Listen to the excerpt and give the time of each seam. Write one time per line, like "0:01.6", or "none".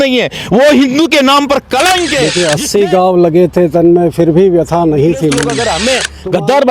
0:02.3
0:05.8